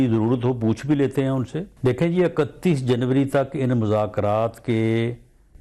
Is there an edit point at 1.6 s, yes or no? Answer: yes